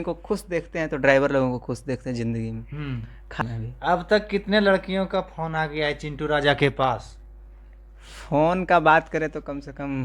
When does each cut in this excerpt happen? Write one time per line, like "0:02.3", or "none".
0:03.4